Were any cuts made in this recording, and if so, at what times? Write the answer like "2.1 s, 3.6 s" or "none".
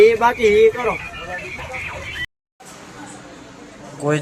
2.4 s